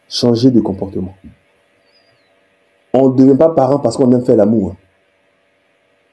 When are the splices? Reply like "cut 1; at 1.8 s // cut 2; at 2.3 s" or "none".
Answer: none